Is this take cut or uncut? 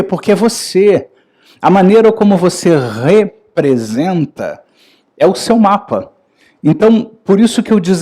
uncut